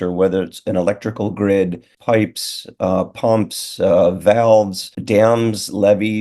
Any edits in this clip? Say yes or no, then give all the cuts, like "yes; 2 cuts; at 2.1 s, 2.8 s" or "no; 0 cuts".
yes; 2 cuts; at 1.9 s, 5.0 s